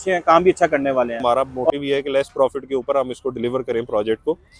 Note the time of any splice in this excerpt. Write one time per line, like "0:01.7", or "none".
0:01.2